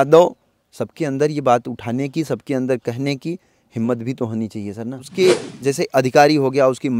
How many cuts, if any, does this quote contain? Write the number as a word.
one